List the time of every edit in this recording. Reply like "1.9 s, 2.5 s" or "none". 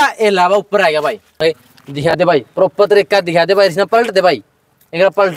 1.4 s